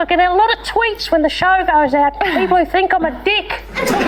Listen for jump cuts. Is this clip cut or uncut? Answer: uncut